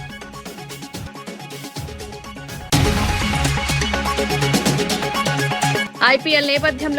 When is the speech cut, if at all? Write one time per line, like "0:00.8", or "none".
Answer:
0:00.9
0:02.6
0:05.8